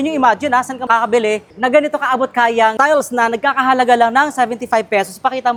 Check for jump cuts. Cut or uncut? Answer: uncut